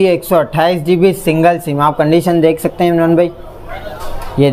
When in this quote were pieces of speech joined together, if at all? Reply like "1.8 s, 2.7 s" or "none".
none